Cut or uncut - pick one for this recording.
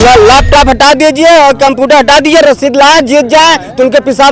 uncut